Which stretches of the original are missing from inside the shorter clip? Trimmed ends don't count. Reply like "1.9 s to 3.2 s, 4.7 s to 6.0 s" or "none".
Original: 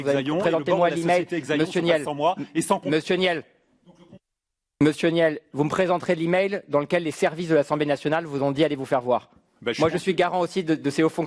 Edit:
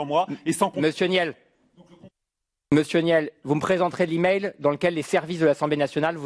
none